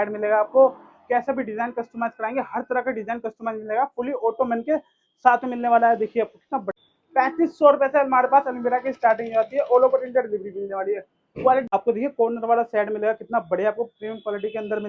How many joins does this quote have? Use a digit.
2